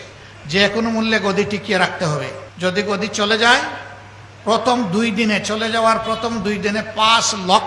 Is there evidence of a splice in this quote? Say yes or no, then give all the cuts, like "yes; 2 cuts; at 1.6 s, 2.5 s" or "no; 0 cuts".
yes; 1 cut; at 2.4 s